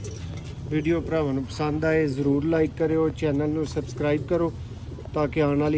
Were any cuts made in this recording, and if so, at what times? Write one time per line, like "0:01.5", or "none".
none